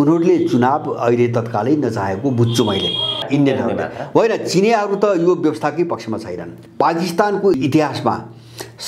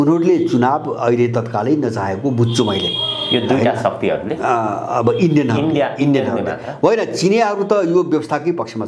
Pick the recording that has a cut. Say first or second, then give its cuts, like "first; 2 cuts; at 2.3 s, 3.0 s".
first; 3 cuts; at 3.2 s, 6.6 s, 7.6 s